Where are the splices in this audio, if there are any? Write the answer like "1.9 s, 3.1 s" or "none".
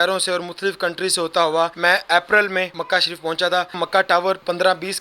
1.7 s, 2.8 s, 3.9 s